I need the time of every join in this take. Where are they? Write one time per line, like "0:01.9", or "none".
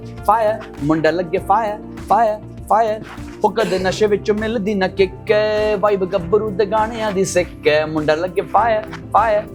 none